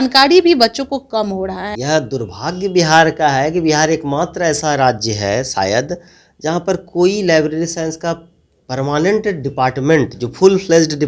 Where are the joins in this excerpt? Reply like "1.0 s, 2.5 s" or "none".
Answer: 1.7 s